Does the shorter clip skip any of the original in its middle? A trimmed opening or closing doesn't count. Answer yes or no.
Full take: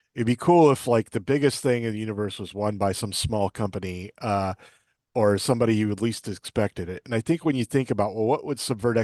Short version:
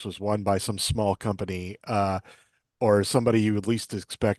no